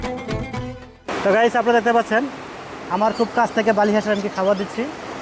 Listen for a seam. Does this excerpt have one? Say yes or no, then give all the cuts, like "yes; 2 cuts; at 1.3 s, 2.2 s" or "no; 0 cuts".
yes; 1 cut; at 1.0 s